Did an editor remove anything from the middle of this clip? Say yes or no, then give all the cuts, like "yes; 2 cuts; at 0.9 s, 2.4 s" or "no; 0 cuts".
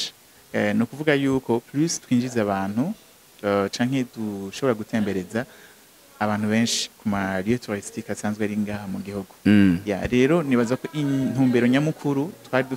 no; 0 cuts